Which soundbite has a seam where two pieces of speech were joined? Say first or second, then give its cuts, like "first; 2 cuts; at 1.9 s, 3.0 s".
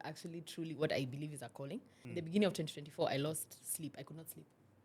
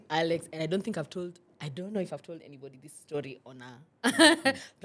first; 1 cut; at 1.9 s